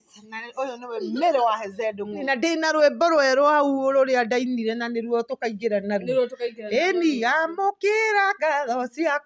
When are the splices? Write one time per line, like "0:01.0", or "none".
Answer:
0:02.2